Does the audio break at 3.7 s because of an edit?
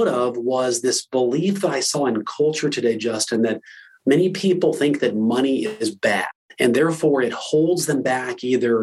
no; 1 cut; at 6.4 s

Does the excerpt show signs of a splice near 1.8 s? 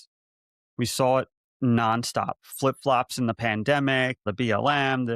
no; 1 cut; at 4.2 s

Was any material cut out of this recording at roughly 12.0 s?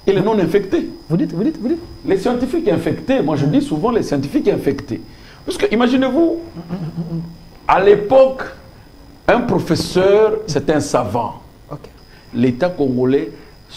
yes; 1 cut; at 12.0 s

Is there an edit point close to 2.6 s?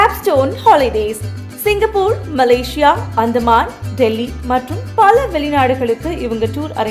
no; 0 cuts

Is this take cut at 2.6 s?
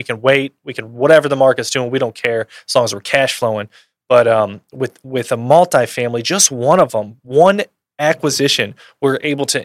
no; 0 cuts

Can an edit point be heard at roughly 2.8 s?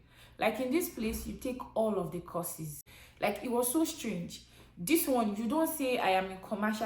yes; 1 cut; at 2.8 s

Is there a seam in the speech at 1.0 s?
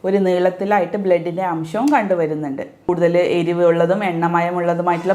no; 1 cut; at 2.9 s

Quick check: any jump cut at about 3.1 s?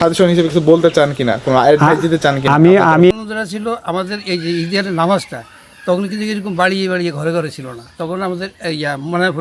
yes; 1 cut; at 3.1 s

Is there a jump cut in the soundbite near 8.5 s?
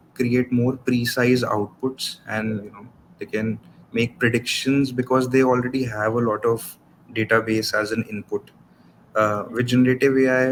no; 0 cuts

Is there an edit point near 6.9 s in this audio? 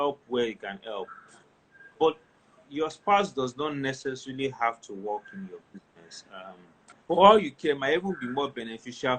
yes; 1 cut; at 6.9 s

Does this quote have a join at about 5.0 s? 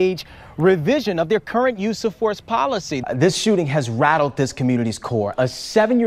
no; 1 cut; at 3.0 s

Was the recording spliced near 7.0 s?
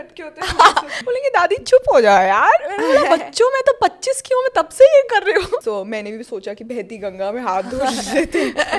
no; 2 cuts; at 0.9 s, 5.6 s

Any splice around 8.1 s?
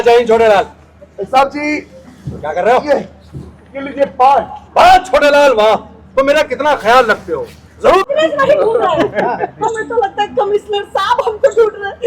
yes; 1 cut; at 8.1 s

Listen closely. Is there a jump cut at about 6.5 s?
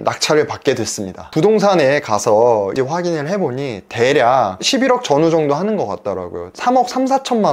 no; 2 cuts; at 1.2 s, 2.7 s

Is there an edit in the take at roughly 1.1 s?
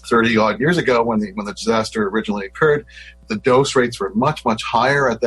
no; 0 cuts

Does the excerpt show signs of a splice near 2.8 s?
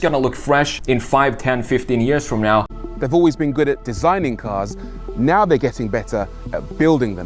yes; 1 cut; at 2.8 s

